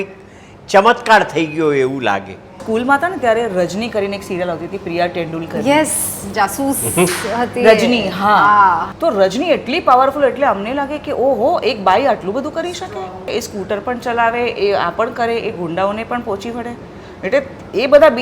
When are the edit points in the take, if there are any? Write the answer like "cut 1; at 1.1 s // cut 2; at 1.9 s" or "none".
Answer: cut 1; at 2.6 s // cut 2; at 8.9 s // cut 3; at 13.3 s